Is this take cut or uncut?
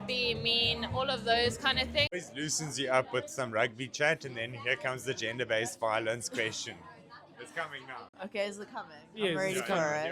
cut